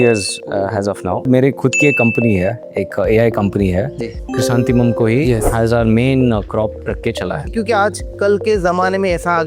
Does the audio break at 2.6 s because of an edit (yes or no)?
no